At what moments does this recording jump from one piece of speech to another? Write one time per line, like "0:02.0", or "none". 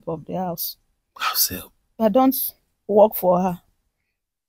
0:01.9